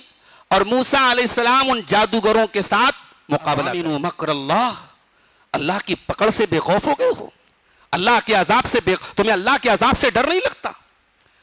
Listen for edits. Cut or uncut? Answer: cut